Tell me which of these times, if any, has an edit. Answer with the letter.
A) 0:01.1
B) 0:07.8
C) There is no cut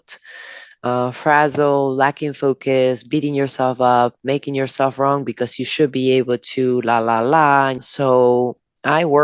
B